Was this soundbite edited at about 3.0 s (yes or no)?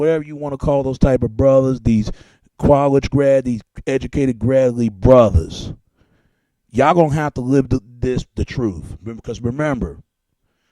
no